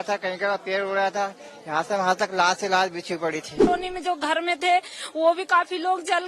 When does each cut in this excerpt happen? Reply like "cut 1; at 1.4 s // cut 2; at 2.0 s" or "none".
cut 1; at 3.7 s